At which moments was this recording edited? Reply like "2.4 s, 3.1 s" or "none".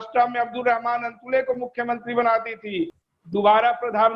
3.0 s